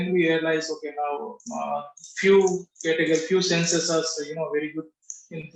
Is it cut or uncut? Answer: uncut